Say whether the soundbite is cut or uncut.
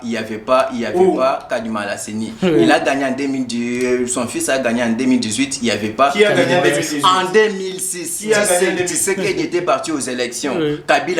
uncut